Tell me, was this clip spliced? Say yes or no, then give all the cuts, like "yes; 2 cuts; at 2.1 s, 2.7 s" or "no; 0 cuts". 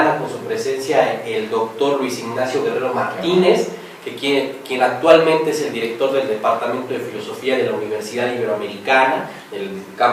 no; 0 cuts